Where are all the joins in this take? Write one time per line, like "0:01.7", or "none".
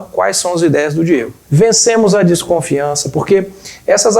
0:01.4

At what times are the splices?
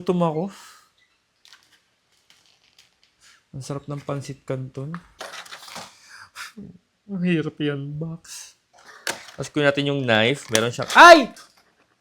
0:05.1

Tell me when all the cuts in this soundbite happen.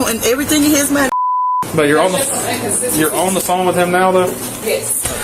0:01.1

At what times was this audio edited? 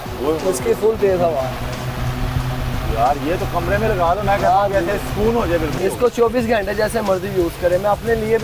0:05.8

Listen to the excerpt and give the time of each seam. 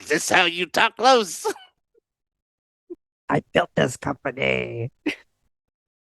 0:02.9

